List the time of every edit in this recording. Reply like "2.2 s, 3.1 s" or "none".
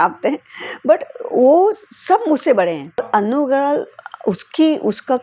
3.1 s